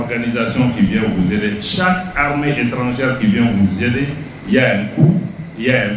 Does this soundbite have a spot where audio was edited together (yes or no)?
no